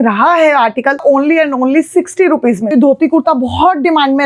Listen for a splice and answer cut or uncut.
cut